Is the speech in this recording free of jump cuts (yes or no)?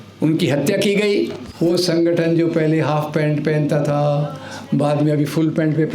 no